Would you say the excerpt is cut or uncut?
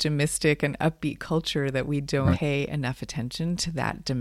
cut